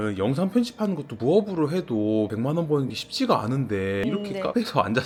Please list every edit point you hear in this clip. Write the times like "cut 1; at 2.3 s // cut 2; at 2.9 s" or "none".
none